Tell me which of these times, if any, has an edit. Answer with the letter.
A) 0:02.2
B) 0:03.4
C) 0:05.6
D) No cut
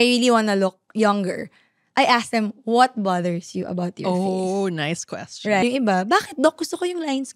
C